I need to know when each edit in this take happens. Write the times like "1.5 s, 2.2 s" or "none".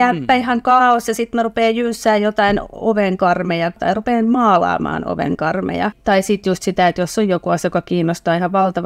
3.8 s, 6.0 s